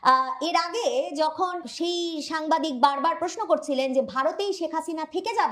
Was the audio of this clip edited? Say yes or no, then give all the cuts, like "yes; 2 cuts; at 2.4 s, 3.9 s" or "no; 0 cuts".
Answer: yes; 1 cut; at 1.7 s